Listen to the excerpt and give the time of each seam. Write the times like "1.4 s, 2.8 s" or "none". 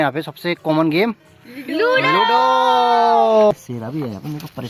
3.5 s